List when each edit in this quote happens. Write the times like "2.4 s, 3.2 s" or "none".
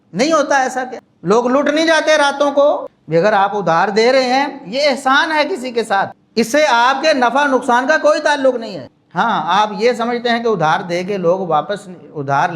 2.9 s, 6.2 s